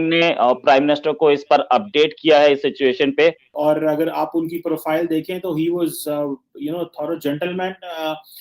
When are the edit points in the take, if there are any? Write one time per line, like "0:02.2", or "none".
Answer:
0:03.6